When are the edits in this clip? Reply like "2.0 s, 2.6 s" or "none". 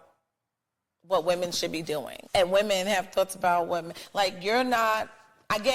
2.1 s